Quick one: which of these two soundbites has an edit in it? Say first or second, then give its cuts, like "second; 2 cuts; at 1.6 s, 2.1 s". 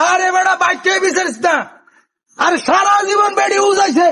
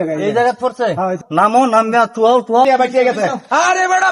second; 2 cuts; at 1.2 s, 2.7 s